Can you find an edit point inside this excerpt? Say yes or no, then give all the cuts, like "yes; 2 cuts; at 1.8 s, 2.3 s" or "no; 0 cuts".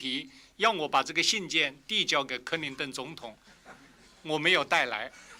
no; 0 cuts